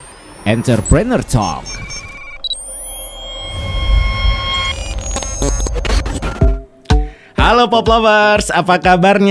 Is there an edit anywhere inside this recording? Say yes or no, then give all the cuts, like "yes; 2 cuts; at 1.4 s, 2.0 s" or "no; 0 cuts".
yes; 1 cut; at 6.4 s